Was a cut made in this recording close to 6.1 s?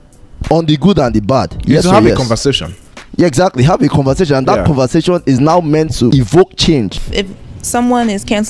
yes; 2 cuts; at 6.1 s, 7.0 s

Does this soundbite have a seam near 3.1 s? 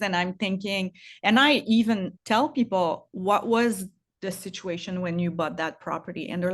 yes; 2 cuts; at 2.1 s, 3.1 s

